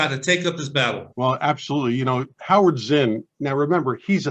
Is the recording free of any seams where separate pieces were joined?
no; 1 cut; at 1.1 s

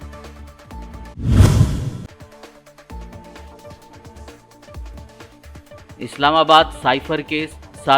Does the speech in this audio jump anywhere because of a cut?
yes; 1 cut; at 1.1 s

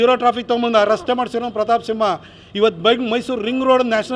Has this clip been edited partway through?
no; 0 cuts

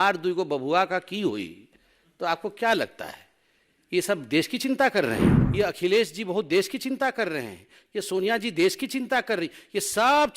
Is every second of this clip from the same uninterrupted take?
no; 1 cut; at 5.4 s

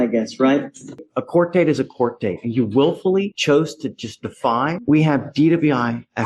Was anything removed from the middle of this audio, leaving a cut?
yes; 2 cuts; at 1.0 s, 4.8 s

